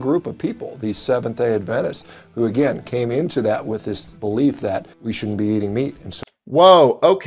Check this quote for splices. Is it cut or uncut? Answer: uncut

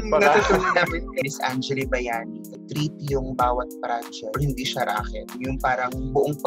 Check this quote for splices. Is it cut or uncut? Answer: cut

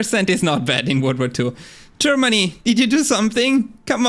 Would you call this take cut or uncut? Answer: uncut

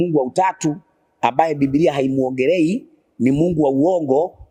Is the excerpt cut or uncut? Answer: uncut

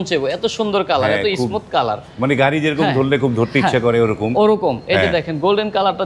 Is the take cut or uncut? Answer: uncut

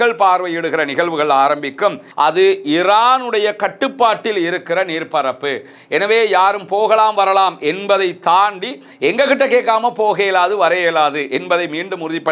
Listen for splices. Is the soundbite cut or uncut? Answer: cut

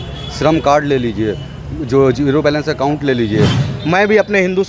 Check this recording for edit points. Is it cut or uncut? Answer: cut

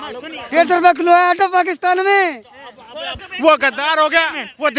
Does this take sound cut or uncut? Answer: cut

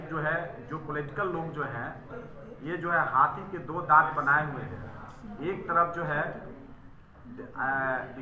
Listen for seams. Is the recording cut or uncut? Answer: uncut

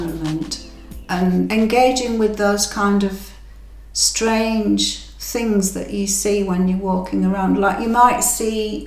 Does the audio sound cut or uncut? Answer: cut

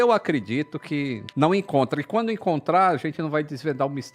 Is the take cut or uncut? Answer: uncut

